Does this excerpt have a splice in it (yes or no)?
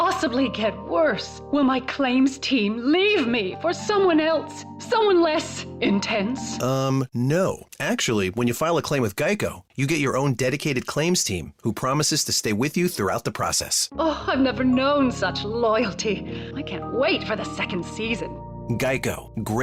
no